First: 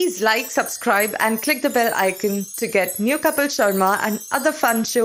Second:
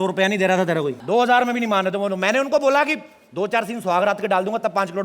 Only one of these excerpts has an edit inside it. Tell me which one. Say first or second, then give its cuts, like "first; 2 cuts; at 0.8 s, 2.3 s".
second; 1 cut; at 1.0 s